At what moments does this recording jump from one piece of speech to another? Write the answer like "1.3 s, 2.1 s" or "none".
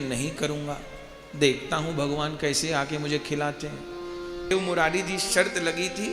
4.5 s